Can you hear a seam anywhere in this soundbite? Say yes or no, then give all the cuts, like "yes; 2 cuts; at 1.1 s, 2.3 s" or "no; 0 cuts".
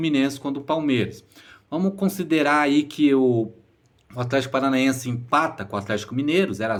no; 0 cuts